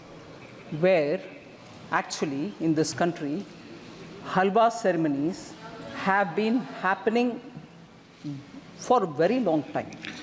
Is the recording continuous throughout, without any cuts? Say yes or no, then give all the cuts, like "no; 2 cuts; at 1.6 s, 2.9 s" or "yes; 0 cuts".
yes; 0 cuts